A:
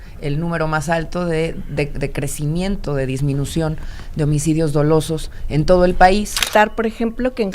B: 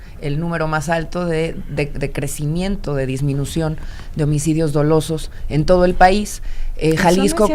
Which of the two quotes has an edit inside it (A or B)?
A